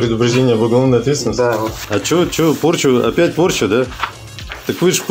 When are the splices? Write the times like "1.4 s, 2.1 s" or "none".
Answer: 1.7 s